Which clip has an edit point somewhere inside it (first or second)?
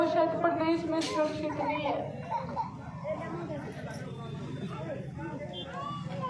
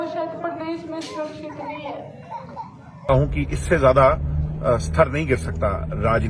second